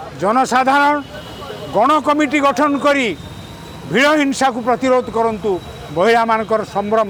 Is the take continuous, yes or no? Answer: yes